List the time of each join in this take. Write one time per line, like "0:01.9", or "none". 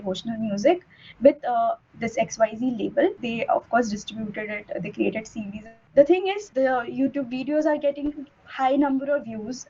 0:03.2
0:06.4